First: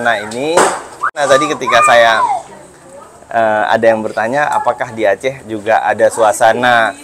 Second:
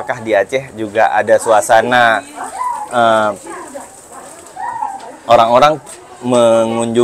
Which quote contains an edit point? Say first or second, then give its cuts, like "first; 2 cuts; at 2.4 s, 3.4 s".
first; 1 cut; at 1.2 s